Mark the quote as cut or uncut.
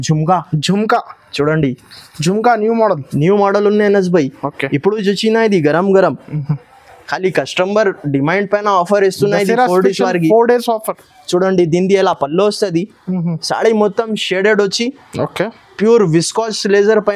uncut